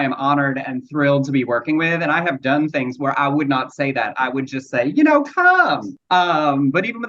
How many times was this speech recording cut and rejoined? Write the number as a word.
one